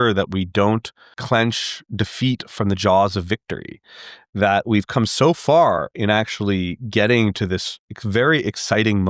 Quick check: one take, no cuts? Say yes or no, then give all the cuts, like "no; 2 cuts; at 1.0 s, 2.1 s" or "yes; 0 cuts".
no; 1 cut; at 1.2 s